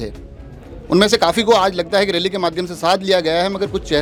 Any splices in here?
no; 0 cuts

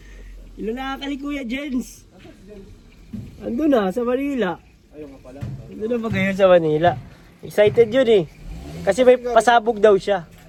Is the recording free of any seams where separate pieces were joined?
yes; 0 cuts

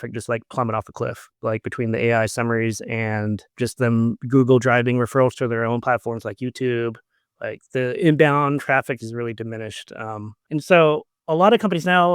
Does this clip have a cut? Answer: yes; 3 cuts; at 3.5 s, 10.3 s, 11.1 s

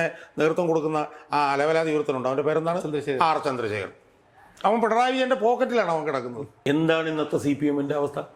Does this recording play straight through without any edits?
no; 1 cut; at 6.5 s

